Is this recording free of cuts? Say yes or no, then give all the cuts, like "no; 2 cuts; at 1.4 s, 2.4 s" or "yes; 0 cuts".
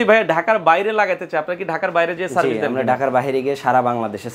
yes; 0 cuts